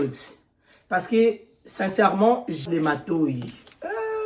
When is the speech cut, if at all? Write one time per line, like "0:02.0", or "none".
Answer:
0:02.6